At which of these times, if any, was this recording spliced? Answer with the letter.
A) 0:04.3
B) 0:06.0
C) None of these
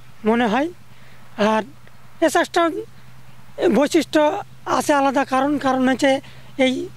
C